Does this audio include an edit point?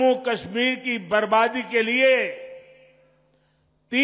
no; 0 cuts

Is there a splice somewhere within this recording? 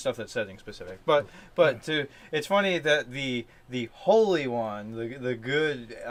no; 0 cuts

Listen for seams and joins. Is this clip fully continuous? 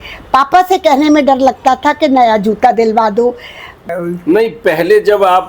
no; 1 cut; at 3.9 s

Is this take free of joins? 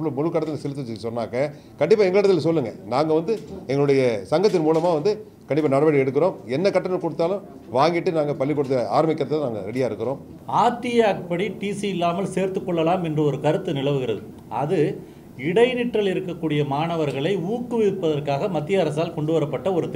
no; 1 cut; at 10.3 s

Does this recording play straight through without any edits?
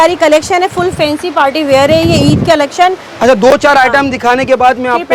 yes; 0 cuts

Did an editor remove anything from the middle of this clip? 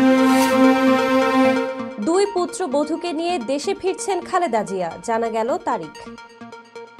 no; 0 cuts

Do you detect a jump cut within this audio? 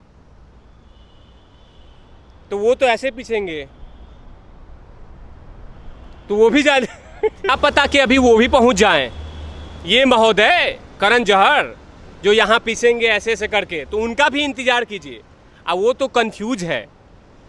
yes; 1 cut; at 7.4 s

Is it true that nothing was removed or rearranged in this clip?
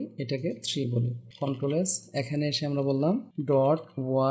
no; 2 cuts; at 1.2 s, 3.3 s

